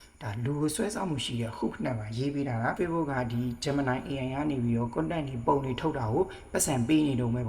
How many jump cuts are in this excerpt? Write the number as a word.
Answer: one